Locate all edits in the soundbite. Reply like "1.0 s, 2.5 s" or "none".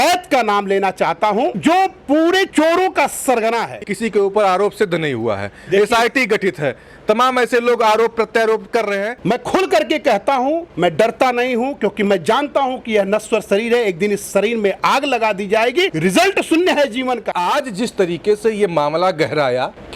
3.8 s, 9.1 s, 17.3 s

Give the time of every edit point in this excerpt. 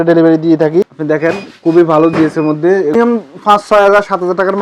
1.5 s, 2.9 s

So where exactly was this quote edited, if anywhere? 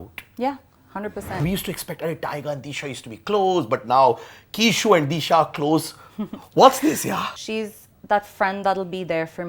1.4 s, 7.3 s

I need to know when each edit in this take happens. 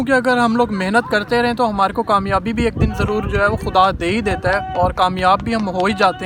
none

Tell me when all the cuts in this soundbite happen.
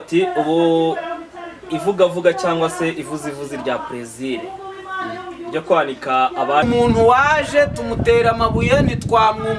6.6 s

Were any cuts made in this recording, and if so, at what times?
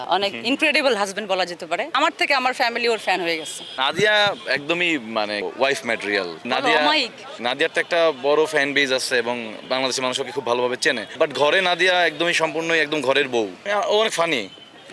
1.9 s, 3.7 s, 7.4 s, 9.5 s

